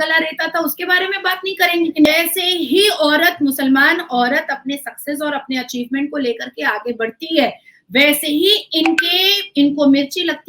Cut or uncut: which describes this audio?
cut